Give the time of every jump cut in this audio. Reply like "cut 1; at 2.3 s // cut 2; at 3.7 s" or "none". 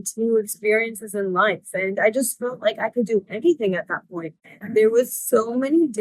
cut 1; at 4.6 s